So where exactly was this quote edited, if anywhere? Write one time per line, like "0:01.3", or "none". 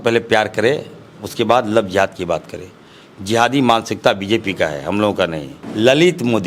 0:05.6